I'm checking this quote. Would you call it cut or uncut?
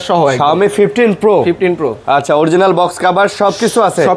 uncut